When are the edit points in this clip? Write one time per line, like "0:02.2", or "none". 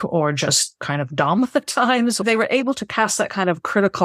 0:02.2